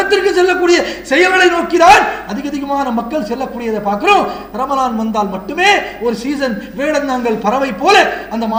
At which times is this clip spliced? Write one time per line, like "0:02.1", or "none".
none